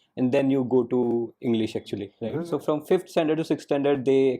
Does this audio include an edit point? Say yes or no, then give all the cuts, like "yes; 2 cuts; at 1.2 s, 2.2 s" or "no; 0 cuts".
yes; 1 cut; at 2.1 s